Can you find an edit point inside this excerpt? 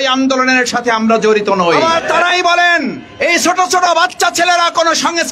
yes; 1 cut; at 1.8 s

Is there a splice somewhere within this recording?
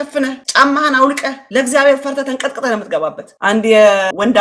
yes; 1 cut; at 3.2 s

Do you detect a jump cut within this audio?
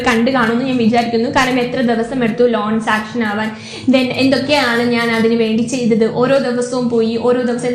no; 0 cuts

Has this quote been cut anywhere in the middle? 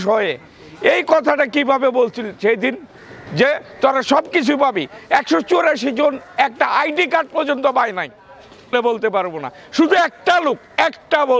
yes; 1 cut; at 8.7 s

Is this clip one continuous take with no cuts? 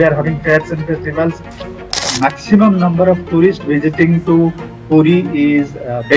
no; 1 cut; at 1.9 s

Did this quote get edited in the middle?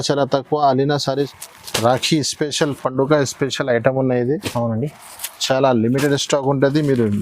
yes; 1 cut; at 1.3 s

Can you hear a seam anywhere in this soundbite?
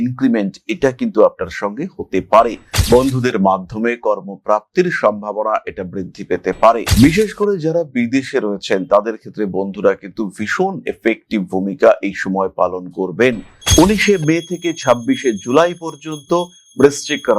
yes; 2 cuts; at 2.7 s, 13.5 s

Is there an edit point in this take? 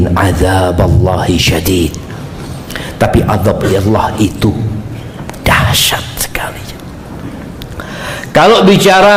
no; 0 cuts

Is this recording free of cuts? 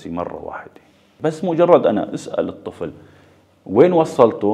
no; 1 cut; at 1.1 s

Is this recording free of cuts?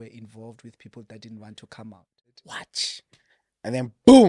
no; 1 cut; at 2.3 s

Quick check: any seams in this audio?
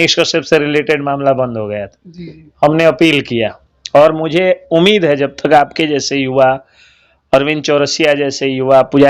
no; 0 cuts

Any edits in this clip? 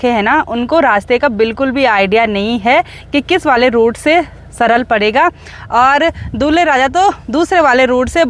no; 0 cuts

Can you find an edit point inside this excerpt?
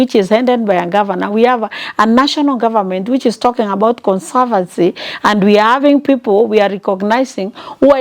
no; 0 cuts

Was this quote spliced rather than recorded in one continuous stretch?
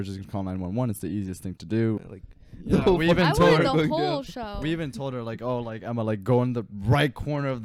yes; 1 cut; at 2.0 s

